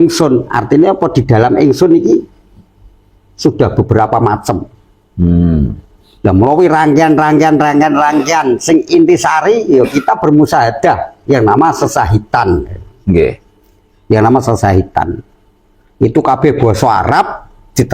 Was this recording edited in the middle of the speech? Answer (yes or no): no